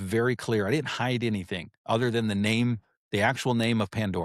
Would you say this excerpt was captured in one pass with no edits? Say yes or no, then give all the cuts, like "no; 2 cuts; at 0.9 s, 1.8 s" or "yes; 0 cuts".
yes; 0 cuts